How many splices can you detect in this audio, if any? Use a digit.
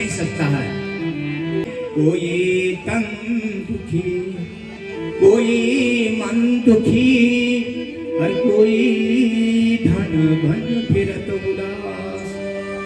0